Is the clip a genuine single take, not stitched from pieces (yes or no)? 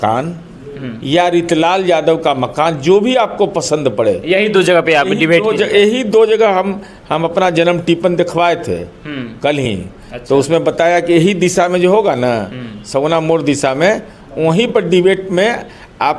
yes